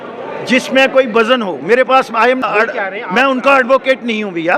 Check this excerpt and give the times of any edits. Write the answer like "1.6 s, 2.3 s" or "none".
2.4 s